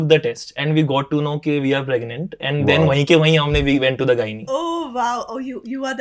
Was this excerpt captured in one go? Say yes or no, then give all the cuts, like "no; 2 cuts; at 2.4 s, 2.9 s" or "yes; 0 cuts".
yes; 0 cuts